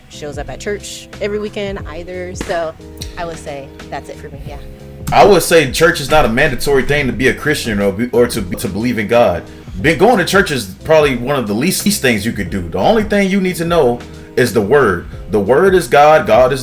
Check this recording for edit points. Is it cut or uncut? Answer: cut